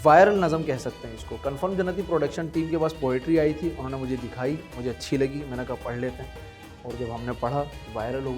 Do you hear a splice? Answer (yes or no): no